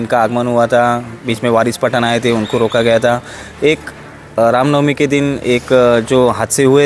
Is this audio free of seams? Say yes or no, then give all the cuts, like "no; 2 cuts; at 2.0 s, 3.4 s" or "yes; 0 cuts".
yes; 0 cuts